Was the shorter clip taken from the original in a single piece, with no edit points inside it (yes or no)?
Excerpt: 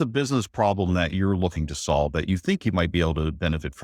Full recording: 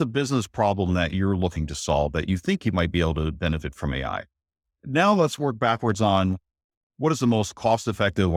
yes